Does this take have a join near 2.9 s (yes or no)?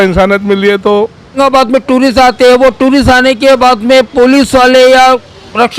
no